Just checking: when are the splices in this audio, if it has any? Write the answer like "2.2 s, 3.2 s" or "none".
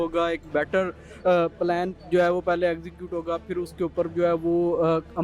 none